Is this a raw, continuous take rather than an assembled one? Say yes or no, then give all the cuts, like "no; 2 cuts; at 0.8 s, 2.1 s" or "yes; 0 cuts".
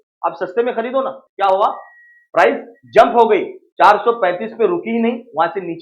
no; 1 cut; at 1.2 s